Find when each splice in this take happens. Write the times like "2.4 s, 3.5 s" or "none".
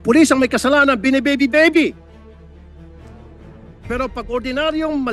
1.9 s, 3.9 s